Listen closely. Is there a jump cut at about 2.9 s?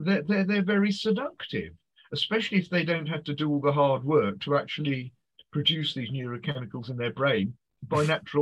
no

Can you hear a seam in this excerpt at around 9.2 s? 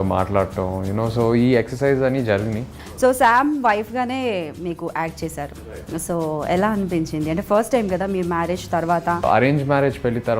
yes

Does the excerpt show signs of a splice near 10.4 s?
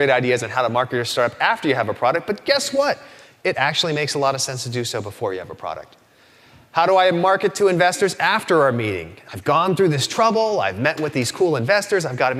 no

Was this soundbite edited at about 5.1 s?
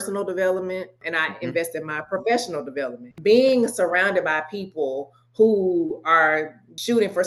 no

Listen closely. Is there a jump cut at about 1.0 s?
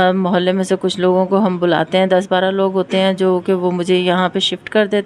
no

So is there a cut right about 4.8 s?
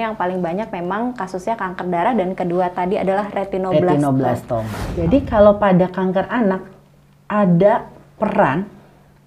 yes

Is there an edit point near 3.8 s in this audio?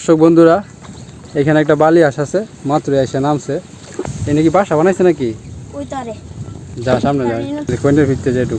yes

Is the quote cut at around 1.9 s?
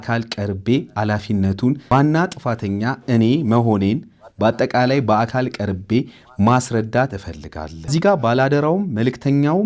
yes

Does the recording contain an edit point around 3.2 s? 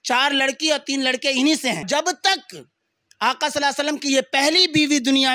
no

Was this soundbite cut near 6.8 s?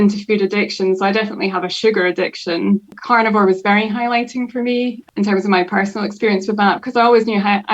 no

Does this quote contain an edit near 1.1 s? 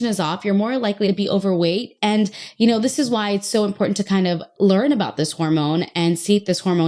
yes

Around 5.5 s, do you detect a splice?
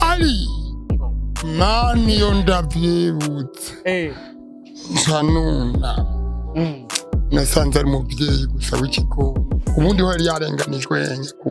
no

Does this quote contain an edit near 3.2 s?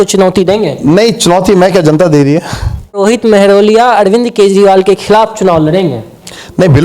yes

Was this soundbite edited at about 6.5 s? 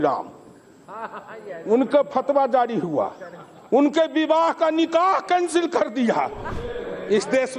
yes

